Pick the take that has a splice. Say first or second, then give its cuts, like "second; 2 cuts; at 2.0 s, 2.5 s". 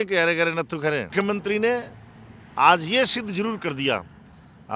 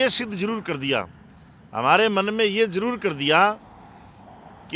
first; 1 cut; at 1.1 s